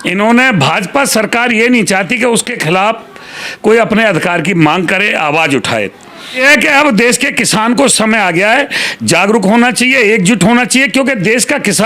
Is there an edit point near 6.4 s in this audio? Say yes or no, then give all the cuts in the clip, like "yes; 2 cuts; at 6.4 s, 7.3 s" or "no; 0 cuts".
yes; 1 cut; at 6.4 s